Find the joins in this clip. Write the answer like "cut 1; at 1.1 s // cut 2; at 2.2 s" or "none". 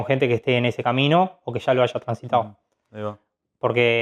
none